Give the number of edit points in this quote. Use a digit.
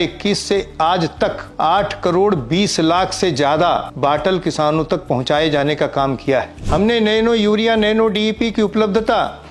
3